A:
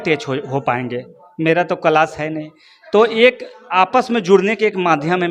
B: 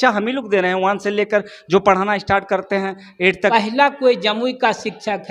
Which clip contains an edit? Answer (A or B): B